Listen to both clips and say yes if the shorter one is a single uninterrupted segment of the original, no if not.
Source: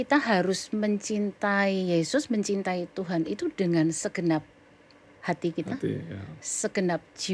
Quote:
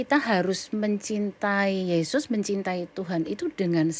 yes